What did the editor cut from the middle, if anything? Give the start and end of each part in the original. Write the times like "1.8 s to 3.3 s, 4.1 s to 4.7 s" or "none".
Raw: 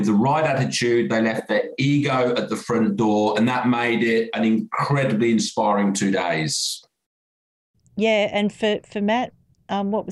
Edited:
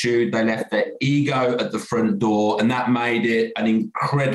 none